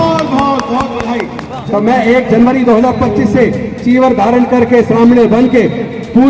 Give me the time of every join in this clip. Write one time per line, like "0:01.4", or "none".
0:01.5